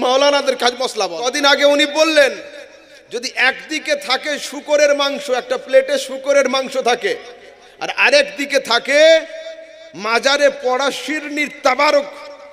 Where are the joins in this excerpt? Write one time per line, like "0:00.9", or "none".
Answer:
0:01.3